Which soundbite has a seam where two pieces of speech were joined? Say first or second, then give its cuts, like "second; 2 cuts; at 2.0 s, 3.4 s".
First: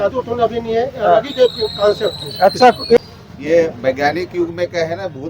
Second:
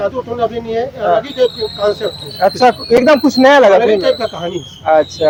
first; 1 cut; at 3.0 s